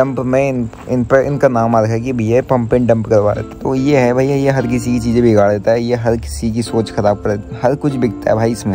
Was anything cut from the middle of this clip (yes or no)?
yes